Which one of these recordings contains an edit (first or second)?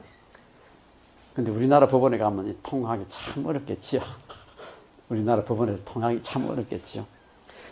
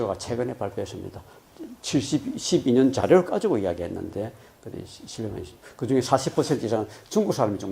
second